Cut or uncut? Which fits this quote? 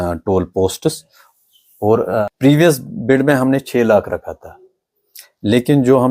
cut